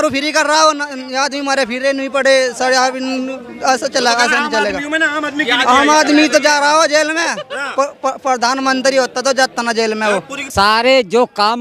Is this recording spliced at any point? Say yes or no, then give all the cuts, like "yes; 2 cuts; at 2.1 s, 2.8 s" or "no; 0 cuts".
yes; 1 cut; at 10.4 s